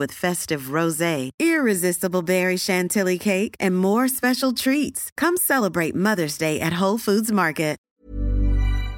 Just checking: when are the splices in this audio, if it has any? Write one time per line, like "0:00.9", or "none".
0:07.8